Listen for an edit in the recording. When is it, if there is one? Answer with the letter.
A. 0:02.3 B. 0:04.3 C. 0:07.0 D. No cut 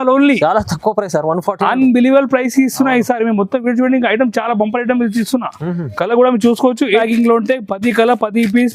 C